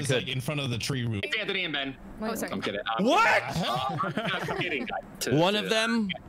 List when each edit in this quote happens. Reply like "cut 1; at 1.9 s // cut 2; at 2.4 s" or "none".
cut 1; at 1.2 s // cut 2; at 5.1 s